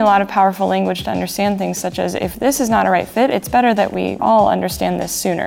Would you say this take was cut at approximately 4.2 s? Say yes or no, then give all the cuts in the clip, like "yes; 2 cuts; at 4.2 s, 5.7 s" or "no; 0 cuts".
yes; 1 cut; at 4.2 s